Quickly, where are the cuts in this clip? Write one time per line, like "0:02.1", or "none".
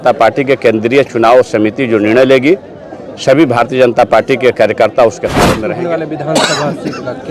0:05.4